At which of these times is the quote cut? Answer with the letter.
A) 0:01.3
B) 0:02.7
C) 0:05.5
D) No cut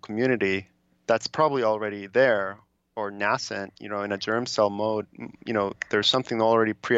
D